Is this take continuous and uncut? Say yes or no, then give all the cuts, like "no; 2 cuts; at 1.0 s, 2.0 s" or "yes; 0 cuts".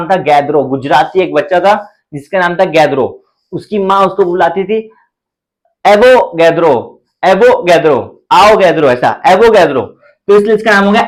yes; 0 cuts